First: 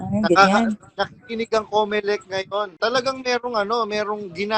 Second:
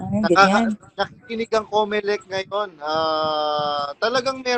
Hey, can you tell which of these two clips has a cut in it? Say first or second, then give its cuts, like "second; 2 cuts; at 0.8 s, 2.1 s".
first; 1 cut; at 2.7 s